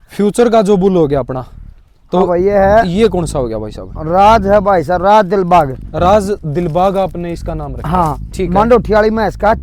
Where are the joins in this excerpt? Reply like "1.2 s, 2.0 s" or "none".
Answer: none

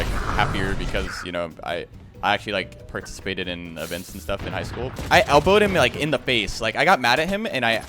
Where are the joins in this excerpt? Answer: 4.9 s

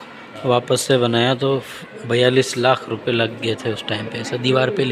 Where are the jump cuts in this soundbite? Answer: none

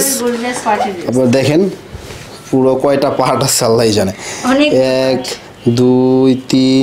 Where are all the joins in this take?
none

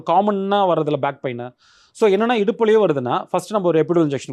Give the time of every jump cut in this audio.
none

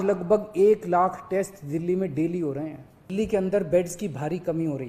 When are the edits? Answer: 3.0 s

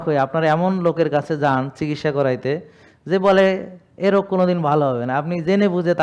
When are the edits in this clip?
none

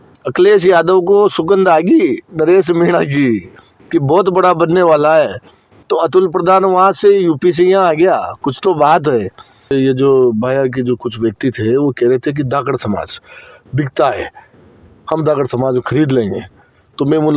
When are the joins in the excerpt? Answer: 9.7 s

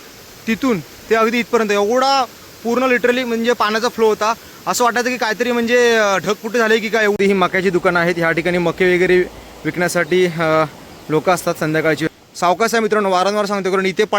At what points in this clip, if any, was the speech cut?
7.2 s, 12.0 s

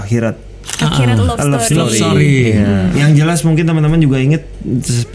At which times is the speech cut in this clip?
2.9 s

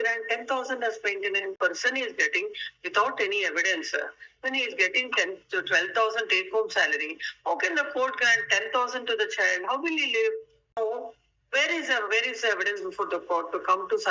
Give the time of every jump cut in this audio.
1.6 s, 10.8 s

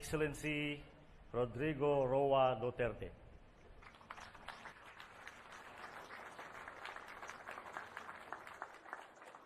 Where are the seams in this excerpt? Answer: none

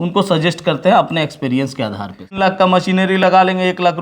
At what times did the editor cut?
2.4 s

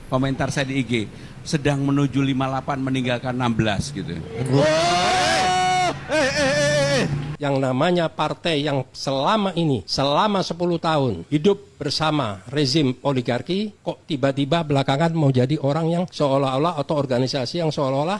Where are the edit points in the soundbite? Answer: 7.3 s

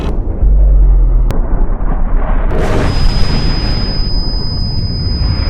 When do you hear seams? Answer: none

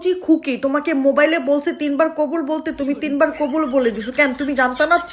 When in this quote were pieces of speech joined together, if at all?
none

